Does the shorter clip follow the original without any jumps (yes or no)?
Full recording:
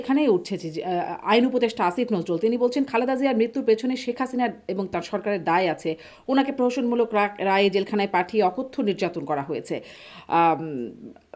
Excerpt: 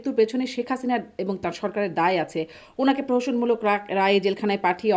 yes